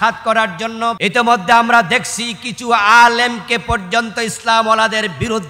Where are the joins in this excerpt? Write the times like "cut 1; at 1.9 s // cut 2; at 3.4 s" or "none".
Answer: cut 1; at 1.0 s